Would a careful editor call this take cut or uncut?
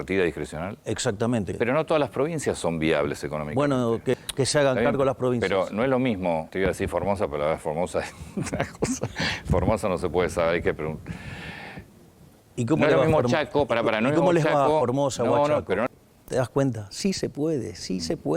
cut